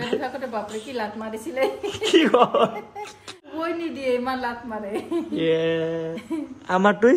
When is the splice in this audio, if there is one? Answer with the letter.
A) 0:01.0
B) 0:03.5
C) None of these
B